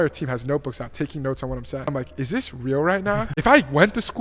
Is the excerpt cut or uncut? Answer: cut